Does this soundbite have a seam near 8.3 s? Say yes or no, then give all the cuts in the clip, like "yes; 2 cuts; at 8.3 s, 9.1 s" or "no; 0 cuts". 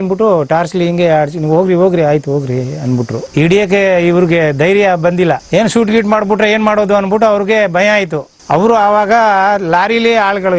yes; 1 cut; at 8.3 s